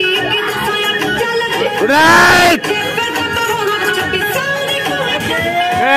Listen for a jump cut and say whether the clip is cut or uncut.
uncut